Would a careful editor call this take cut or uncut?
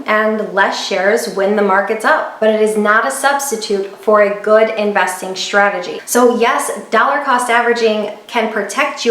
cut